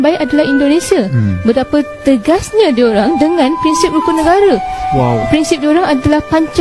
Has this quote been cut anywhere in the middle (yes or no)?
no